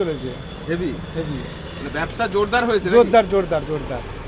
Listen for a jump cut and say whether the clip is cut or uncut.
uncut